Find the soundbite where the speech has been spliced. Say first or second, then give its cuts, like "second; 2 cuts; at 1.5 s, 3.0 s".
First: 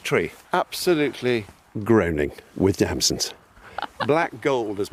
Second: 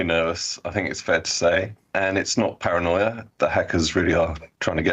second; 1 cut; at 1.8 s